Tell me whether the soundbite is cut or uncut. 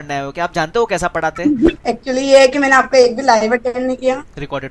cut